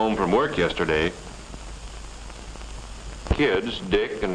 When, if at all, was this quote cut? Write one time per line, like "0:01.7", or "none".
0:02.2